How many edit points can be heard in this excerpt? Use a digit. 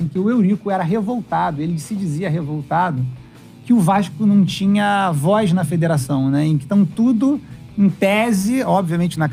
0